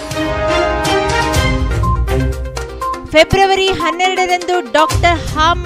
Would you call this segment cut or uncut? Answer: cut